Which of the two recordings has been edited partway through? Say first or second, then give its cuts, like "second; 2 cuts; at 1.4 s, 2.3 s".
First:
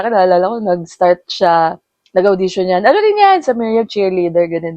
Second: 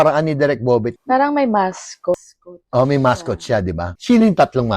second; 2 cuts; at 1.0 s, 3.9 s